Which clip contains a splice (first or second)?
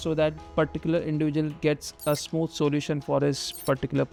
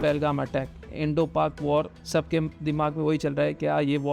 second